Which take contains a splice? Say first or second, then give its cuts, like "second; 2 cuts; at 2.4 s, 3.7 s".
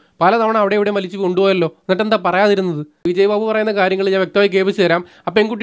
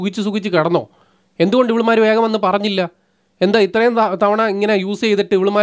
first; 1 cut; at 3.0 s